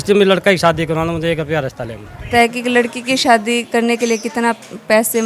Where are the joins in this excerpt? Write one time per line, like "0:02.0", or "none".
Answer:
0:02.3
0:03.8